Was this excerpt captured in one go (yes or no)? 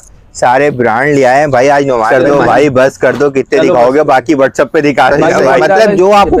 no